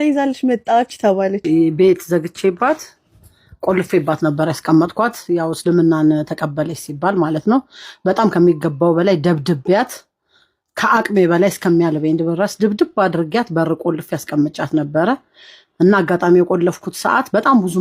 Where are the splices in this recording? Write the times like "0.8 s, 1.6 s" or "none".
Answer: 1.4 s